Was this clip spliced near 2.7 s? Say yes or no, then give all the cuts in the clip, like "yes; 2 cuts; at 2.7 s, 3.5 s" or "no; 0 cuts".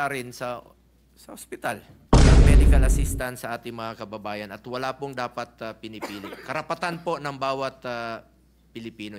yes; 1 cut; at 2.7 s